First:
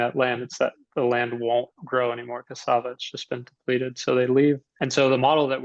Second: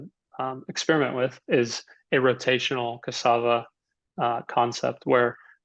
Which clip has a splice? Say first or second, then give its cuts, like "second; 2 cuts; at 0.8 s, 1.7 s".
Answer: first; 1 cut; at 4.7 s